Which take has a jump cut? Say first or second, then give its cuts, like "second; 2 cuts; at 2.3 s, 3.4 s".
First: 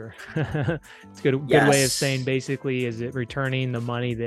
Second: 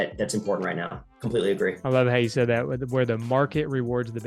second; 1 cut; at 1.8 s